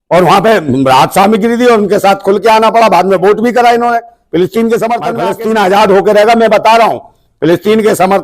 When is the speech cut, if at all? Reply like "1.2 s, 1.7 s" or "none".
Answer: 5.3 s